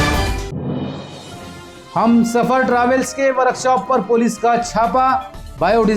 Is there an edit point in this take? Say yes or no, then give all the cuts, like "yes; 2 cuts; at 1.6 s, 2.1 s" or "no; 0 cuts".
yes; 1 cut; at 1.1 s